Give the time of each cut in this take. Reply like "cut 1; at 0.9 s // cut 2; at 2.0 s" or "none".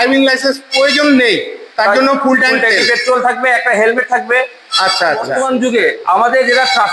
cut 1; at 5.3 s